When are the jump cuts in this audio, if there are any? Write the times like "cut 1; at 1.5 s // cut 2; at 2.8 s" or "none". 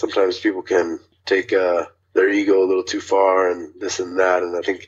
cut 1; at 1.1 s // cut 2; at 2.0 s